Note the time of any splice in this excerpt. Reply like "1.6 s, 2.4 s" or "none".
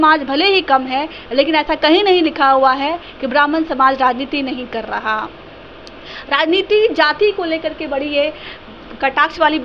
none